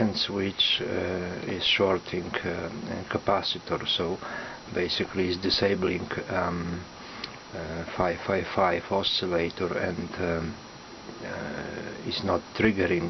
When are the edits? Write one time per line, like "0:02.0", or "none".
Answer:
0:02.8